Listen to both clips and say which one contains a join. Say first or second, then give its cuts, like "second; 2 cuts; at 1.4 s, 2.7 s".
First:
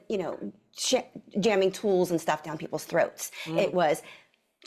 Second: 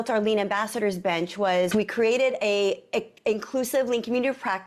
second; 1 cut; at 1.7 s